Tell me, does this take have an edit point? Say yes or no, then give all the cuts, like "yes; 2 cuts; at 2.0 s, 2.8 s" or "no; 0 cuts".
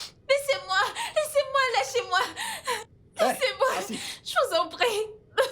yes; 1 cut; at 3.0 s